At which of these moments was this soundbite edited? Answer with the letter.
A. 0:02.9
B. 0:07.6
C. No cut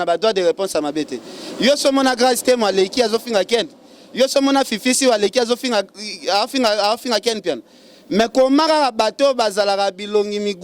C